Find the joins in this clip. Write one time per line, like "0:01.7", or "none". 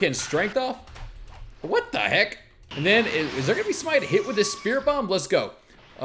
0:02.6